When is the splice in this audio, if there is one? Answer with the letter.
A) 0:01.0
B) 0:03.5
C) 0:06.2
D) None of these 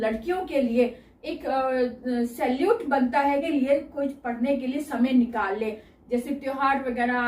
B